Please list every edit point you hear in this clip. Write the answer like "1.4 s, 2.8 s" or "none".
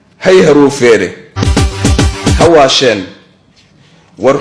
none